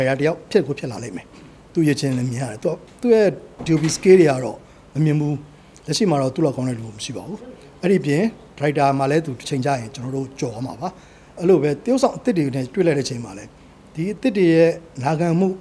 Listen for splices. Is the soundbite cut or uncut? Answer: uncut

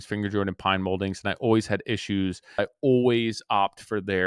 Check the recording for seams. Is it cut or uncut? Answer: cut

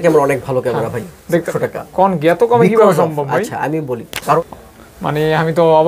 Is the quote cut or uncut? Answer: cut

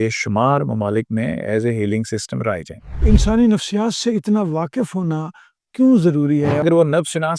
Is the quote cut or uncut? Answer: cut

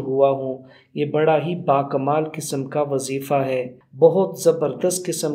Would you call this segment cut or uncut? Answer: cut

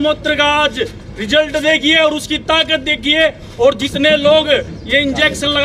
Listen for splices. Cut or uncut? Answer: uncut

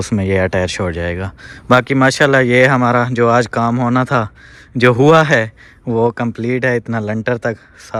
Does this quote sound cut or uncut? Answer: uncut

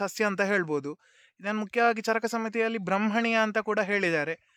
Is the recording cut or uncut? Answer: uncut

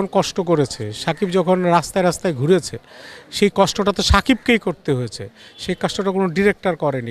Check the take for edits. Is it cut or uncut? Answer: uncut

